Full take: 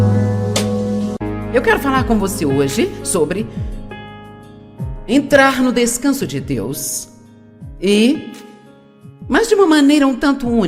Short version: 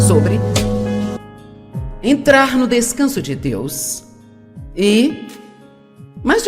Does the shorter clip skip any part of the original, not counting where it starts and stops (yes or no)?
yes